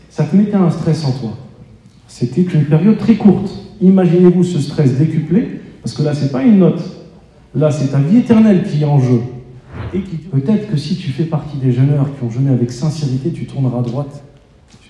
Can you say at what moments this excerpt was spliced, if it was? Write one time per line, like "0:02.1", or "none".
0:10.1